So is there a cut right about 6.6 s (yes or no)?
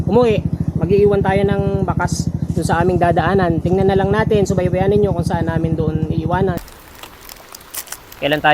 yes